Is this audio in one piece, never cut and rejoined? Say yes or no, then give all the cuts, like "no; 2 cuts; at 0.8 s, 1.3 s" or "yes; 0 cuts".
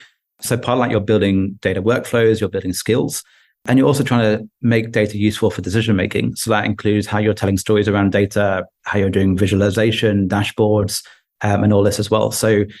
yes; 0 cuts